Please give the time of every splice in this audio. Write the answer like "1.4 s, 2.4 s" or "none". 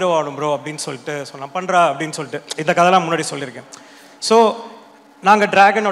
none